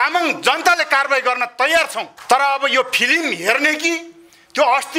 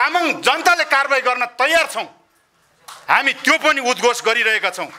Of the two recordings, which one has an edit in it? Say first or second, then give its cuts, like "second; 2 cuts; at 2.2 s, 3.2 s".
first; 1 cut; at 2.1 s